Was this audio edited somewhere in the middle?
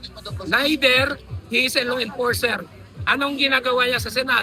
no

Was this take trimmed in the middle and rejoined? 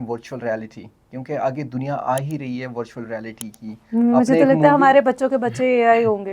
no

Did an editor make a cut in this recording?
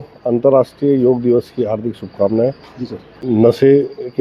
yes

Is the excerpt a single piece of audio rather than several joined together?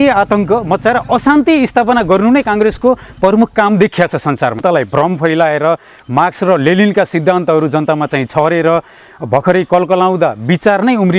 no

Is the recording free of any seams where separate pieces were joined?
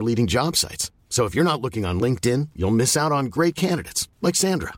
yes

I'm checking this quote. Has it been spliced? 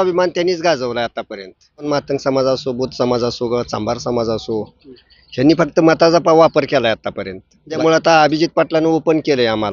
yes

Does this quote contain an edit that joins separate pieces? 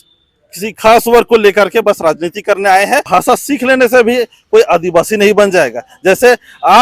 yes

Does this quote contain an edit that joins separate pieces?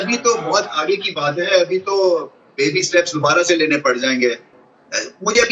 no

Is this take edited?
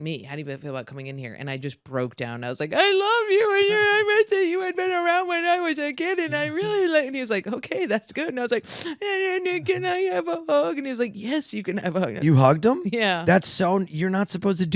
no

